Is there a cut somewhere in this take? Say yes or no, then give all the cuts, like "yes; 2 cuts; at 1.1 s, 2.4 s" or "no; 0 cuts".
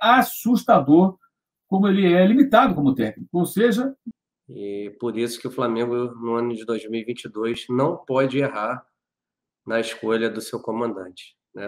yes; 1 cut; at 4.1 s